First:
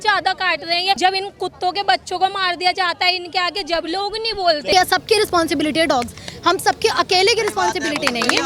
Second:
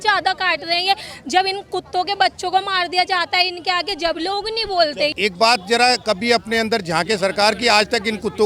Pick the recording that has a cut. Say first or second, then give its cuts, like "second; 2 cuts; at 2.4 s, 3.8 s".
first; 2 cuts; at 1.0 s, 4.7 s